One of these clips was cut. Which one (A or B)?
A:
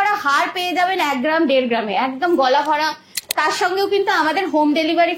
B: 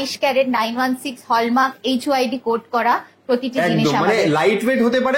A